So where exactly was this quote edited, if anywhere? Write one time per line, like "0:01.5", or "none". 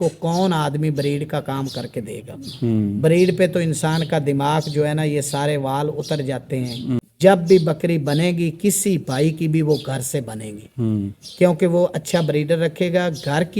0:07.0